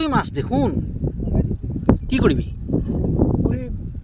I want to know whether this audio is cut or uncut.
uncut